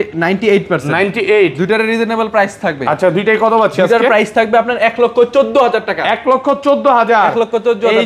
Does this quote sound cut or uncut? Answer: uncut